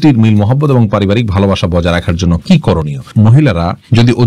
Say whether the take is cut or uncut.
cut